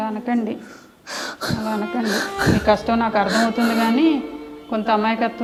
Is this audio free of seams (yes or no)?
yes